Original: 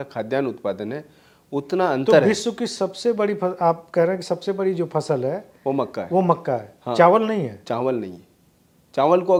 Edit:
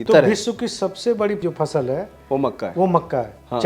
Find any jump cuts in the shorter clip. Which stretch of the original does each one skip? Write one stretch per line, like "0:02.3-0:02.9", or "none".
0:03.4-0:04.7